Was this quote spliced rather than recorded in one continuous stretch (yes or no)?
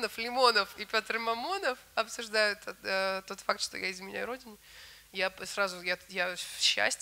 no